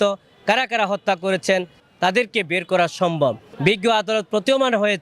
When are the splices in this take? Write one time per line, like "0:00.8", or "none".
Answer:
0:01.8
0:03.5